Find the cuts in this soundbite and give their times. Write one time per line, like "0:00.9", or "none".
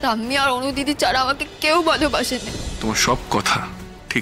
0:02.5